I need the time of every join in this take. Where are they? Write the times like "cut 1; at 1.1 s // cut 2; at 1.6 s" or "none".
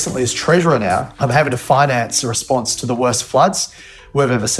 cut 1; at 1.1 s